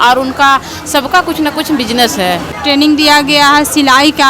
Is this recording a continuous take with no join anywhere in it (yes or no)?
no